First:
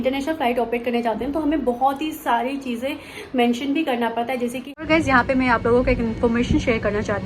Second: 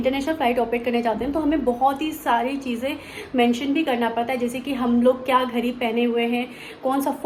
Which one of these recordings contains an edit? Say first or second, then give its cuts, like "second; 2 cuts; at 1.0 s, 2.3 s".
first; 1 cut; at 4.7 s